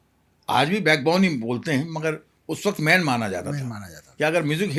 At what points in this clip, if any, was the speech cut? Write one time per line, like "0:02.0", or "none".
none

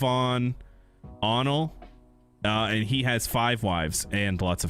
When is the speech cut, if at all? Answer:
none

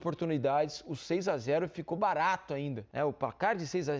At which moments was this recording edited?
0:02.8

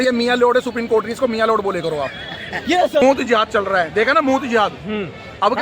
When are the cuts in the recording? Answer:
0:03.0

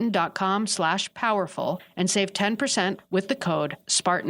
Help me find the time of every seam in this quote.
none

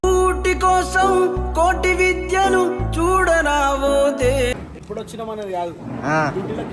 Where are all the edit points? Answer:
0:04.5

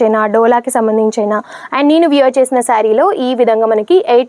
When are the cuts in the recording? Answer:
none

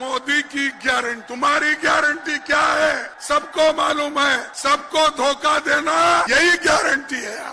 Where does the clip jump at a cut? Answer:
0:01.2
0:03.1
0:04.5
0:06.3

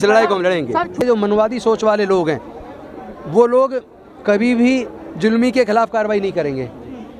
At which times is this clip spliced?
0:01.0

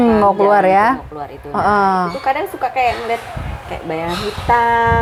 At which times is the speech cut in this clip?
none

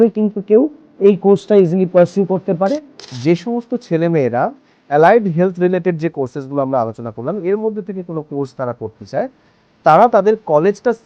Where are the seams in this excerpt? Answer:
0:03.1

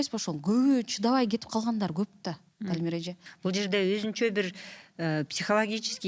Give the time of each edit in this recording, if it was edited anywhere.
0:03.2

